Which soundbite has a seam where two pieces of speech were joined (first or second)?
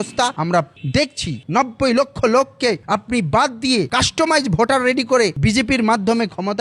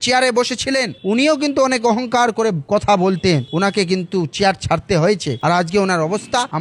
first